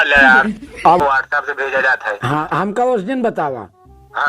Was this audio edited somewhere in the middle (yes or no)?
yes